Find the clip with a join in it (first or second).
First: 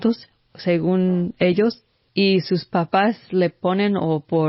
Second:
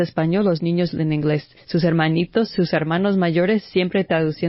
first